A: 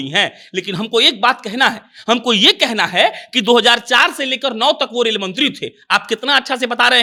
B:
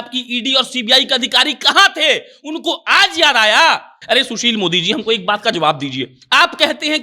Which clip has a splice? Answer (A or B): B